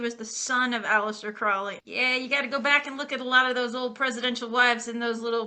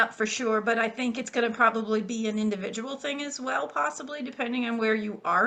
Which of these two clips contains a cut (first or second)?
first